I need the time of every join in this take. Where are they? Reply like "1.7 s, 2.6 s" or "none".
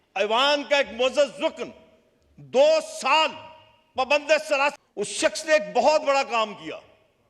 4.7 s